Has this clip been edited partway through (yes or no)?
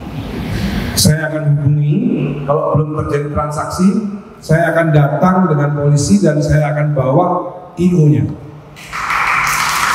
no